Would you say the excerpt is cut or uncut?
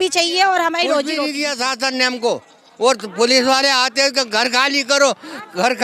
cut